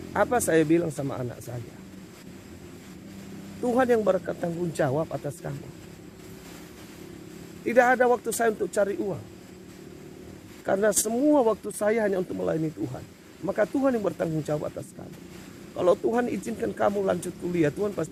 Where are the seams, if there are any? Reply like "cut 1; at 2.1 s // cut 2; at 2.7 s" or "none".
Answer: none